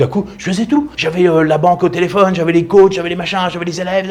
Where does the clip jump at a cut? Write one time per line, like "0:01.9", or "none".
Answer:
none